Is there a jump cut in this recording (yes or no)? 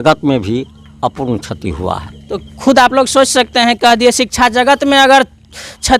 no